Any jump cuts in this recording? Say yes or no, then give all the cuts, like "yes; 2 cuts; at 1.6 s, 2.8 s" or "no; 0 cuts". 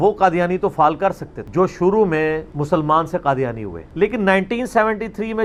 no; 0 cuts